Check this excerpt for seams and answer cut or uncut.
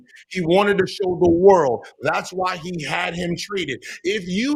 uncut